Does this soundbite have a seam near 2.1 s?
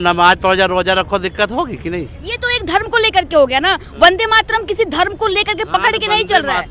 no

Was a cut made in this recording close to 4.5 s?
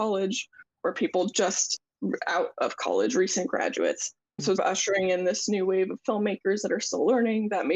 yes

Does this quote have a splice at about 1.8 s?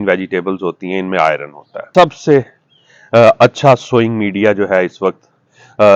yes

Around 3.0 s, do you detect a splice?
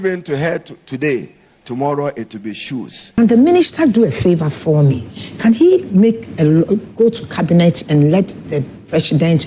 yes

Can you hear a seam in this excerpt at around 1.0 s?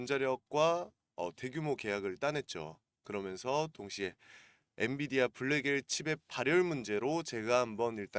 yes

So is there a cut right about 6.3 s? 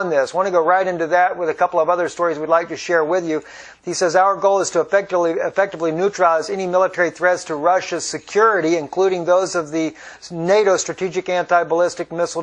no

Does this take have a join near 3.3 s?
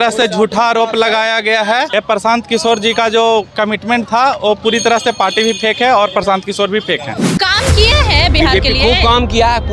no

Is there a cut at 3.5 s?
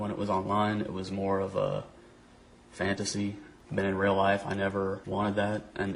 yes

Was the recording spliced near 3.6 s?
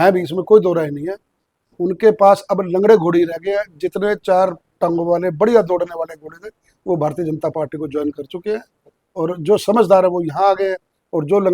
no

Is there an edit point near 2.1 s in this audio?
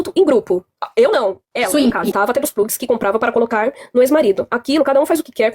yes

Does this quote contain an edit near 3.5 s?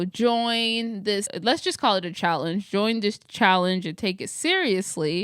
no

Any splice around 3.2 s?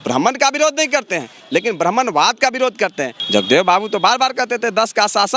yes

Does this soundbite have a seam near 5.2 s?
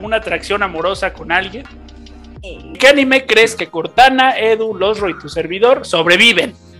no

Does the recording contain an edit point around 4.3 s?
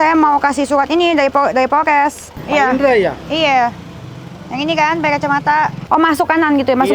no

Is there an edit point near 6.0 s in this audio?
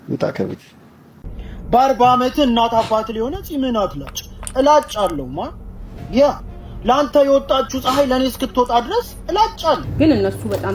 no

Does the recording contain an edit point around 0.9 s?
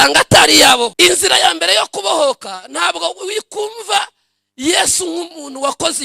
yes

